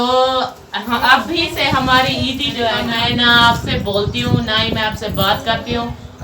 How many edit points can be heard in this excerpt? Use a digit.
1